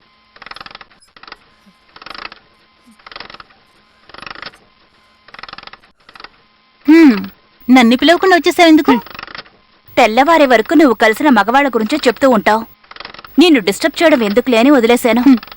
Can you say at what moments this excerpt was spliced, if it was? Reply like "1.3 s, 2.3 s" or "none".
1.5 s